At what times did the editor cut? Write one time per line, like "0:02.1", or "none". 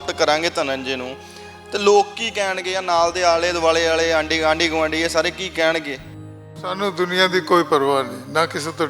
0:06.4